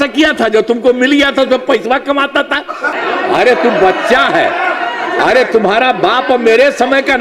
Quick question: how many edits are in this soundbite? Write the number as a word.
two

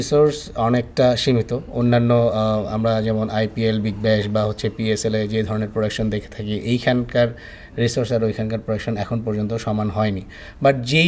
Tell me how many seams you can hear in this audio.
zero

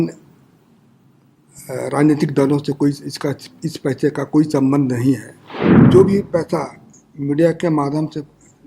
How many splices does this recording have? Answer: one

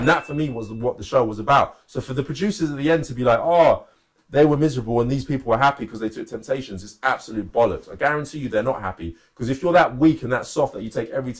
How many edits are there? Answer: zero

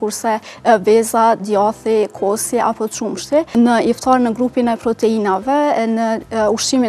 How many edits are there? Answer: one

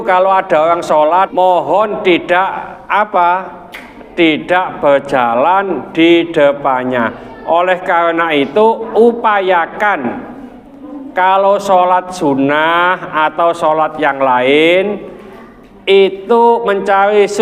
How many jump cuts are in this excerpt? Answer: one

